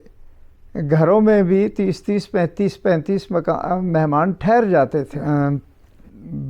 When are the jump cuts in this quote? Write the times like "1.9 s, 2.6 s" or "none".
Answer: 5.1 s